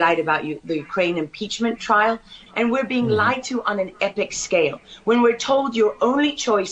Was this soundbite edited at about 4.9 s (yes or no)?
no